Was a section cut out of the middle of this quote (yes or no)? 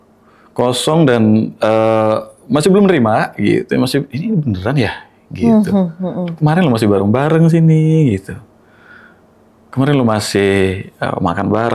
no